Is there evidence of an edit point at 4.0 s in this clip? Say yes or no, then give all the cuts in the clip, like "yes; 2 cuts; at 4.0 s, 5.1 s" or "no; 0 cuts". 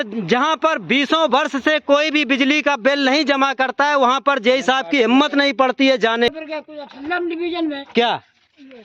no; 1 cut; at 6.3 s